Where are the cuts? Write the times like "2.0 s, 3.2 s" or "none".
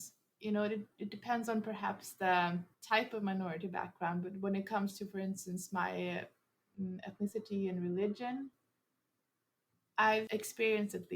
2.7 s